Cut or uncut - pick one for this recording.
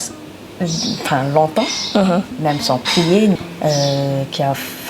cut